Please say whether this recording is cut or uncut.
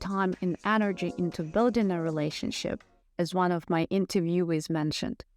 uncut